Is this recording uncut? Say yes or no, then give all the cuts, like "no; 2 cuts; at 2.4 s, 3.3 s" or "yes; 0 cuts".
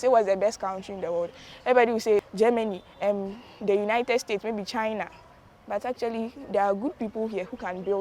no; 1 cut; at 2.3 s